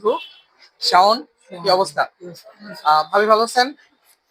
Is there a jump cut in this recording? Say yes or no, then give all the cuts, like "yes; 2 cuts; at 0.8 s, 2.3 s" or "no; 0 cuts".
no; 0 cuts